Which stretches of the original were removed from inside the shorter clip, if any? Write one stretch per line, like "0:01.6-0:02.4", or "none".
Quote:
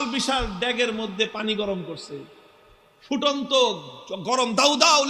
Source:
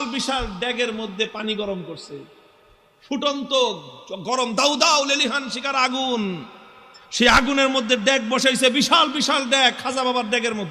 none